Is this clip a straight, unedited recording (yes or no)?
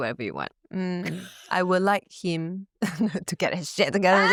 yes